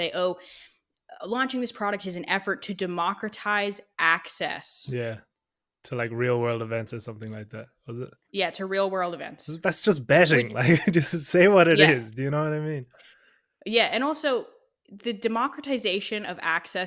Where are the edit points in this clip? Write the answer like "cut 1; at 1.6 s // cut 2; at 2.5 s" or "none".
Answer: none